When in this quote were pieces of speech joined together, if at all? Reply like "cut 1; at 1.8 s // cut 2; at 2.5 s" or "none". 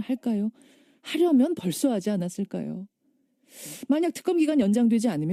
none